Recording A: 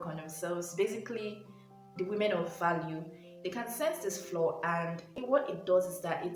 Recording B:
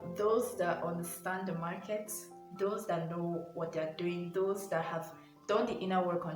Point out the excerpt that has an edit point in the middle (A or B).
A